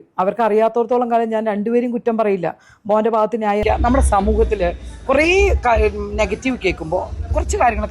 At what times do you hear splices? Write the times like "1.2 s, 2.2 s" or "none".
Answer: 3.6 s